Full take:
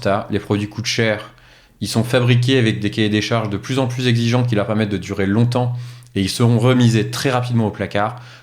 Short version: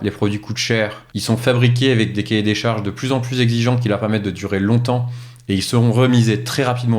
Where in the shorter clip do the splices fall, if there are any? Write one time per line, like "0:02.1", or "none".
0:01.1